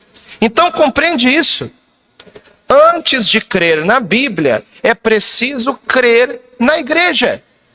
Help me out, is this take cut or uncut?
cut